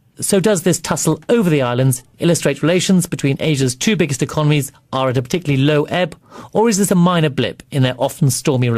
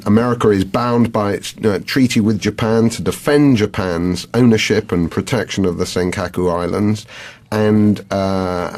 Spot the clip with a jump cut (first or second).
first